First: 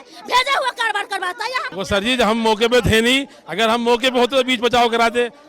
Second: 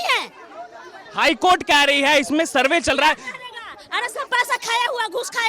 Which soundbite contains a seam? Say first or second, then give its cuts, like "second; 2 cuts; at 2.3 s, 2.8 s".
first; 1 cut; at 1.6 s